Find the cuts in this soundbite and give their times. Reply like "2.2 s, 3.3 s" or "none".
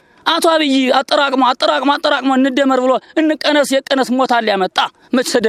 none